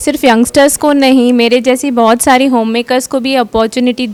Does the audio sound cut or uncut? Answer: uncut